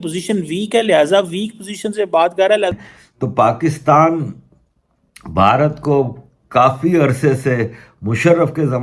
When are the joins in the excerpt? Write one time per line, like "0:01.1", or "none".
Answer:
0:02.7

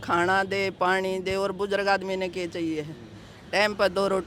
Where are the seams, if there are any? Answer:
none

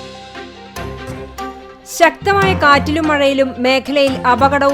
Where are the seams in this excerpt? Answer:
0:01.1

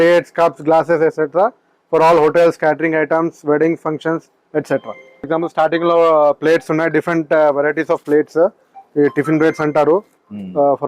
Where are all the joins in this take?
0:05.3

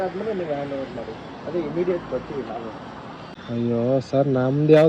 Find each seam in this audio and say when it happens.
0:03.4

